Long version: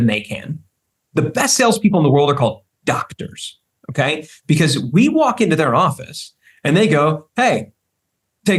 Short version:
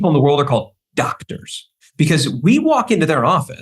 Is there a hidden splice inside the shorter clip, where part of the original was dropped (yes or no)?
yes